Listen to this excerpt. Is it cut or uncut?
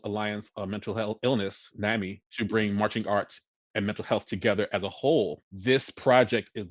cut